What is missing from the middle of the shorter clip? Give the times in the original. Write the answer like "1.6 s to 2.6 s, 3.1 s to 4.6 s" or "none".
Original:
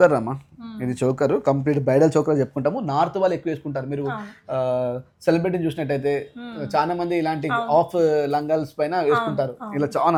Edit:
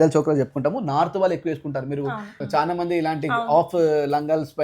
4.3 s to 6.5 s